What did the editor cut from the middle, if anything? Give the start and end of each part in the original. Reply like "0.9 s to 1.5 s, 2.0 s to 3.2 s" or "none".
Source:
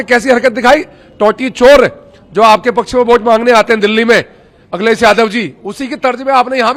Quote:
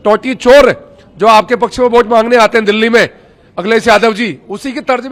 none

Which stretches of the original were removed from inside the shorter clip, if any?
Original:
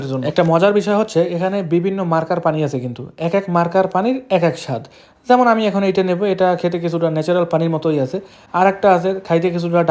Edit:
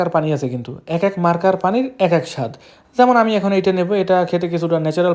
none

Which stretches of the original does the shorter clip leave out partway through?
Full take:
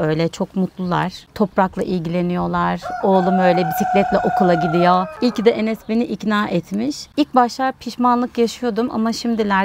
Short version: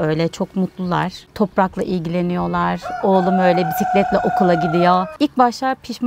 5.1 s to 7.1 s

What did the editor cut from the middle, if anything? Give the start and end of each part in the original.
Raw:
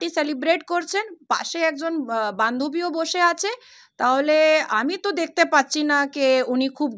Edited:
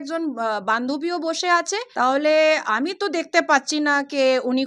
3.5 s to 3.8 s

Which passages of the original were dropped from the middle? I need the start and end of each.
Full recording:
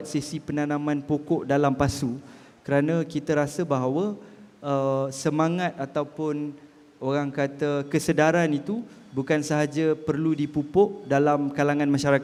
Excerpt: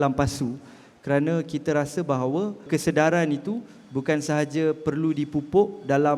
4.3 s to 7.9 s

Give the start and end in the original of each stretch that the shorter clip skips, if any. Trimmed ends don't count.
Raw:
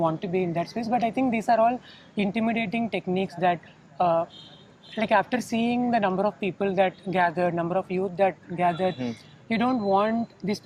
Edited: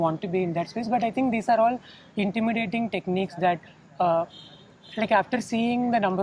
none

